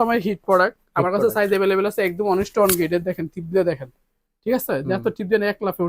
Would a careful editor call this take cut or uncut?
uncut